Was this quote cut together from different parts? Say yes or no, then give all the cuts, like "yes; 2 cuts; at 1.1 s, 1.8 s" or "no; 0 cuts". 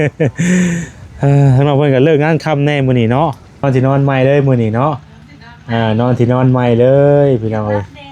yes; 1 cut; at 3.6 s